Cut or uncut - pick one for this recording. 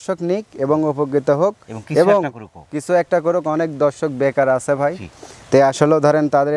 uncut